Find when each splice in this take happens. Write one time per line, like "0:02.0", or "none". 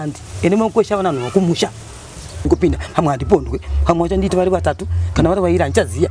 0:02.4